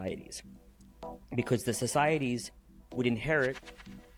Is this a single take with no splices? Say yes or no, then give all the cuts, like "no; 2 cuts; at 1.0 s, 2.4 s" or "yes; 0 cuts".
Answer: yes; 0 cuts